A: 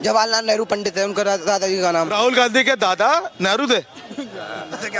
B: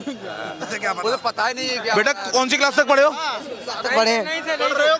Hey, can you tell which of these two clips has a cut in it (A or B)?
A